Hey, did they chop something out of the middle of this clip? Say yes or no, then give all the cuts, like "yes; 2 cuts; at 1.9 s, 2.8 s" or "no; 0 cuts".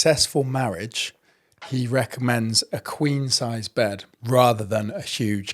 yes; 1 cut; at 4.1 s